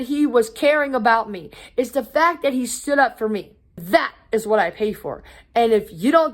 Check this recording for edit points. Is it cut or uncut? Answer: cut